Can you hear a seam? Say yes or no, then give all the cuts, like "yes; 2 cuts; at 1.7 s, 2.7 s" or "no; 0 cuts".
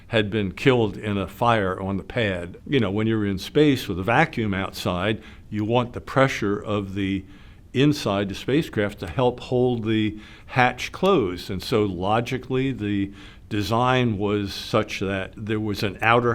yes; 2 cuts; at 2.5 s, 15.4 s